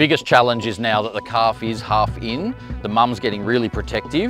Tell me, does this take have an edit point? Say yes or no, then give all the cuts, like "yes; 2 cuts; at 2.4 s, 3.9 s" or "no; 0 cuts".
no; 0 cuts